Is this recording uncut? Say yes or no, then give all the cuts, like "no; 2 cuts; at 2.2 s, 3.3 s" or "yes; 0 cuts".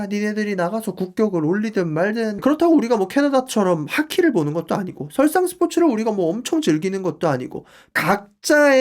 no; 2 cuts; at 2.3 s, 7.9 s